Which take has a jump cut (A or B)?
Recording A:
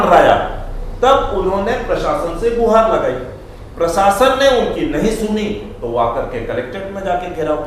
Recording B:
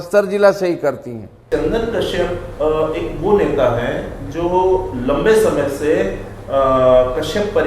B